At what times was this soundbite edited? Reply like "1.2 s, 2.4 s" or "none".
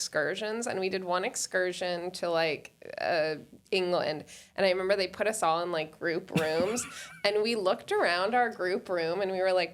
none